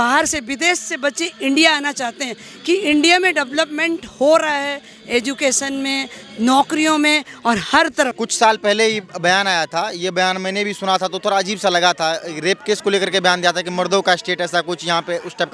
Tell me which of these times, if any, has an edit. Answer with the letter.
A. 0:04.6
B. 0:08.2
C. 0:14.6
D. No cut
D